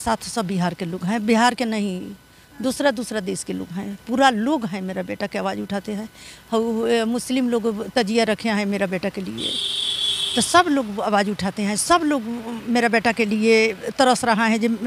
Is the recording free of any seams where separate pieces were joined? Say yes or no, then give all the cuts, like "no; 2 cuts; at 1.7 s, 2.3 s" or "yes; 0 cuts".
yes; 0 cuts